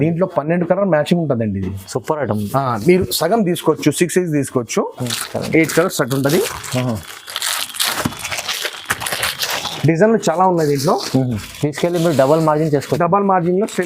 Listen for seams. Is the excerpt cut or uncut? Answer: cut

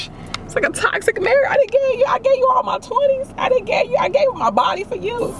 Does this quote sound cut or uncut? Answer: uncut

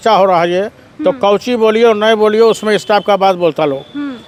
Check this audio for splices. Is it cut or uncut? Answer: uncut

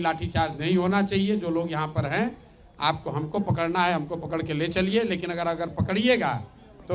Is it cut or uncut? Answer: uncut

